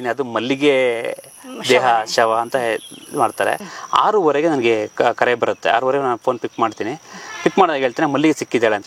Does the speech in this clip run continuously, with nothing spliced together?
no; 1 cut; at 3.7 s

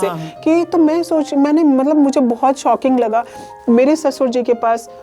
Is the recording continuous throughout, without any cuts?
no; 1 cut; at 3.4 s

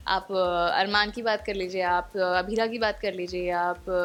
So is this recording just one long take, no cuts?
yes; 0 cuts

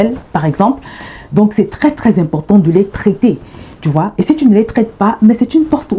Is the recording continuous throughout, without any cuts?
yes; 0 cuts

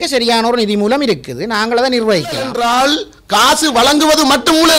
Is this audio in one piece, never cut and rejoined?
no; 1 cut; at 2.5 s

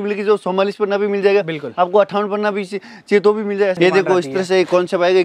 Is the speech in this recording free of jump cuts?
no; 1 cut; at 3.8 s

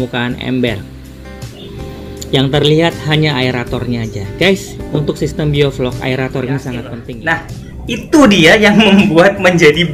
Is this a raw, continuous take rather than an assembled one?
no; 1 cut; at 7.0 s

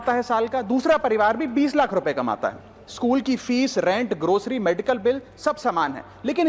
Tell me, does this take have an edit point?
no; 0 cuts

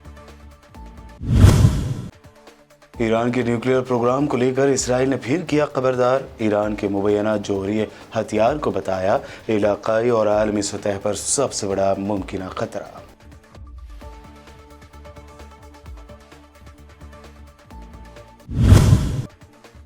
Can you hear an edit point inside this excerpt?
yes; 1 cut; at 0.9 s

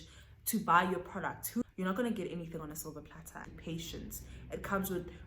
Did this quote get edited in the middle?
yes; 2 cuts; at 1.6 s, 3.5 s

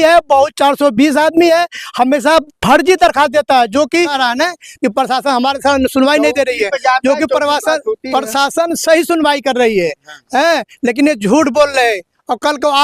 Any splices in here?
yes; 1 cut; at 4.1 s

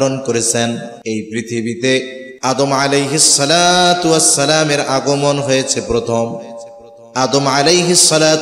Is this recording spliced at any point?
yes; 2 cuts; at 0.9 s, 2.2 s

